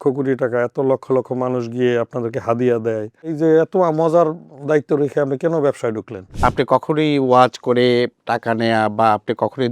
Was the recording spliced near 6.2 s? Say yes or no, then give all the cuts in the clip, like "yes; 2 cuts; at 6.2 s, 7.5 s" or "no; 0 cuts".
yes; 2 cuts; at 3.3 s, 6.2 s